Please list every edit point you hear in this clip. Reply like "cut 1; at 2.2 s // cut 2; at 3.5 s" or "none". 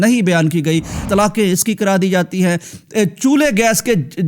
cut 1; at 1.0 s